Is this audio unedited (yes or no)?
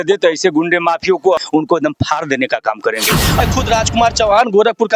no